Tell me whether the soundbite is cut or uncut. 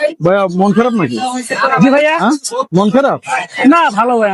uncut